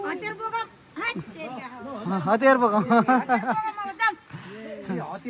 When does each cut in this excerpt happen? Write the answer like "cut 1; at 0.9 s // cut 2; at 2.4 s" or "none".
none